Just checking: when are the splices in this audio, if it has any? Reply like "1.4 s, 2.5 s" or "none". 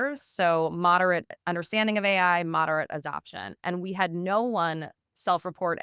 none